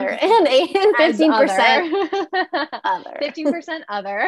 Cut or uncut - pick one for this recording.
uncut